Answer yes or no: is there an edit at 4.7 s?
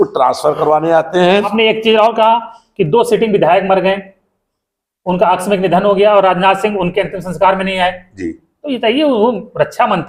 no